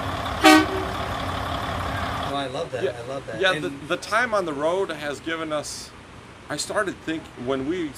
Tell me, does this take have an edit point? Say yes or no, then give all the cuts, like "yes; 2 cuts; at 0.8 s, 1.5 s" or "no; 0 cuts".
no; 0 cuts